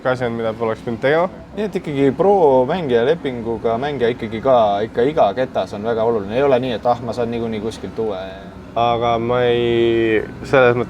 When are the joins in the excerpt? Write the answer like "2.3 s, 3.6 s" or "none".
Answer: 1.5 s, 8.3 s